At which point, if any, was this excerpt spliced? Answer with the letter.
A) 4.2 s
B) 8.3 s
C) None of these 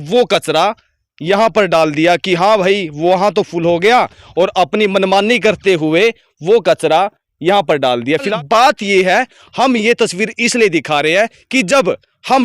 B